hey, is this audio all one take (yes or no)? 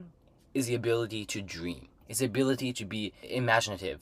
no